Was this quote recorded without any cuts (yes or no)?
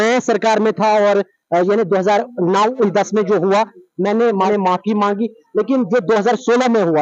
yes